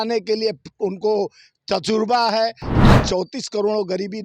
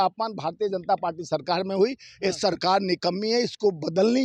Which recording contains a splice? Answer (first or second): first